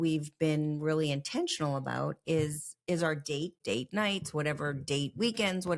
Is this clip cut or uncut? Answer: cut